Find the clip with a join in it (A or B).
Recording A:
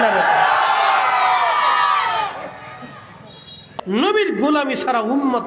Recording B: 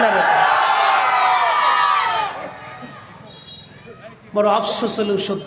A